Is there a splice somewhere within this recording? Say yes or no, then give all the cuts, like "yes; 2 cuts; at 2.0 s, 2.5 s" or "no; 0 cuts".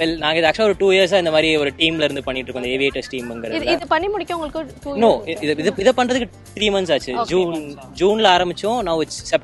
no; 0 cuts